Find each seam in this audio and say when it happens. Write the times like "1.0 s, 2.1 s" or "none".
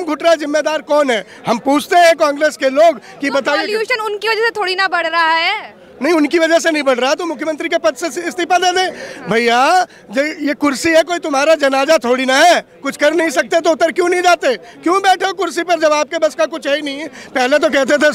none